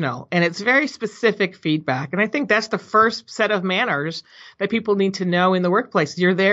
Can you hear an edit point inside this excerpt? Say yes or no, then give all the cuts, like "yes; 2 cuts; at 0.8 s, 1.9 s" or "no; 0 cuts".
no; 0 cuts